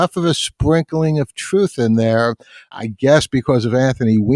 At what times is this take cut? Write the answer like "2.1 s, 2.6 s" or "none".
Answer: 2.7 s